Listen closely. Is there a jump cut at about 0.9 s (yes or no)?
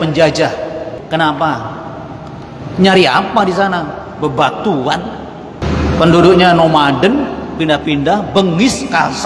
yes